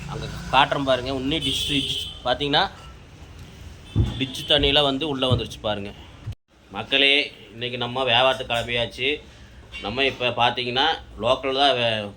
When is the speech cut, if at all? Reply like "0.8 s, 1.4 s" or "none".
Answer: 6.2 s